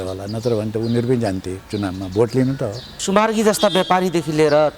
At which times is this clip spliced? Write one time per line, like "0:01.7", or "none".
0:02.9